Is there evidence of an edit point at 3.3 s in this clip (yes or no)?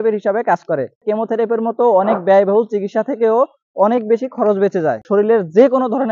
no